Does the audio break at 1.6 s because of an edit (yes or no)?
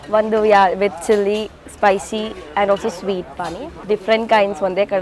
no